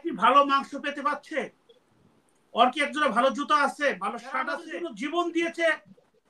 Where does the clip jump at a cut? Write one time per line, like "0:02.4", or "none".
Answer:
0:04.6

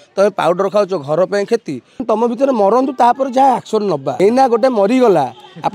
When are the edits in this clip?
0:02.0
0:04.1

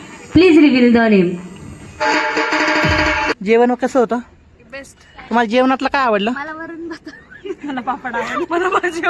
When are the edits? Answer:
0:03.3

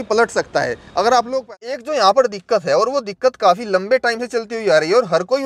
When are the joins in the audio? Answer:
0:01.4

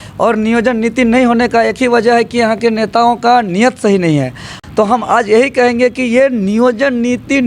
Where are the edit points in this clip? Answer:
0:04.6

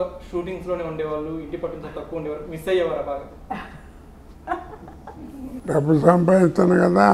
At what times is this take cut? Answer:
0:05.6

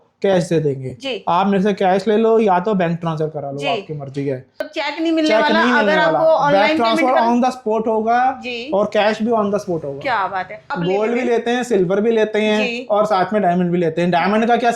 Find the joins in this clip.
0:04.7
0:10.7

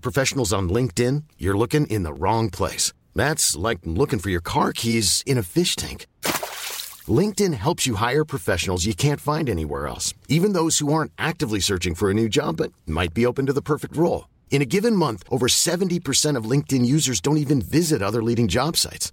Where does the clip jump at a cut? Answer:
none

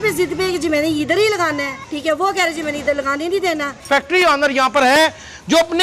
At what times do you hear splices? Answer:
0:01.8
0:03.8

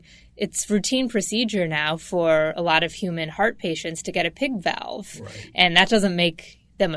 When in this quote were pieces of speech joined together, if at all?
none

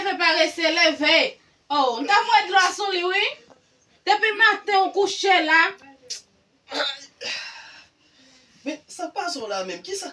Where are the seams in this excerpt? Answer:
none

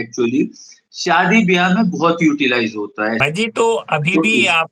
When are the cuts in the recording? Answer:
0:03.2

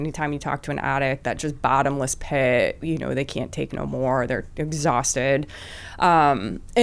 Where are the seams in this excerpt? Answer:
none

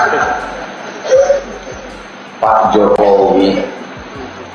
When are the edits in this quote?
none

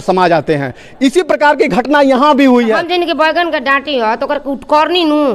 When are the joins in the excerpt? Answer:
0:02.8

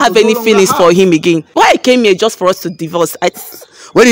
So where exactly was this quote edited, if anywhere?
0:01.5
0:03.4

